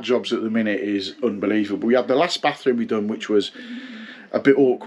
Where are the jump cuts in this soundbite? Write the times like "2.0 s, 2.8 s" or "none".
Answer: none